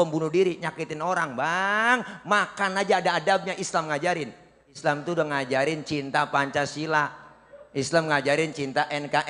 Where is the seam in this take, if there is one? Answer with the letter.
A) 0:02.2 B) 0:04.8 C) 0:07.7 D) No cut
B